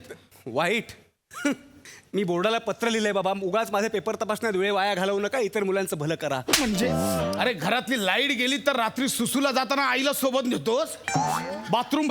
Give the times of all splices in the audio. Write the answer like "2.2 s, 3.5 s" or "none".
7.4 s

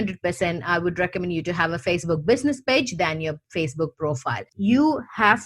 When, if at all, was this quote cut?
4.5 s

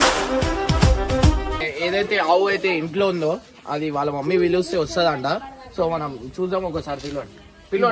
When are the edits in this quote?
1.6 s

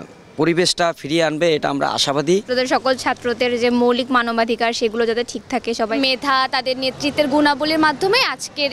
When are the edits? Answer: 2.5 s, 5.9 s

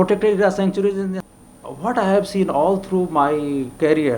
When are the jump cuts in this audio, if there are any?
1.2 s

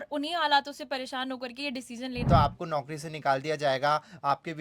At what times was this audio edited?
2.2 s

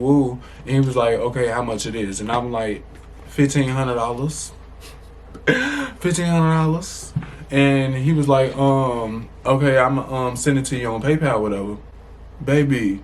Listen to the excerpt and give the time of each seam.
none

